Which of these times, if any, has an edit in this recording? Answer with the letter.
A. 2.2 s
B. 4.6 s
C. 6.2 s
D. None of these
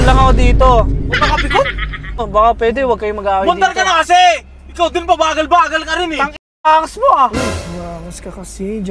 A